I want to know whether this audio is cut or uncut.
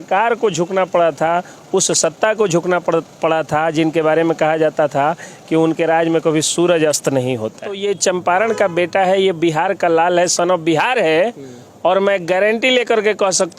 cut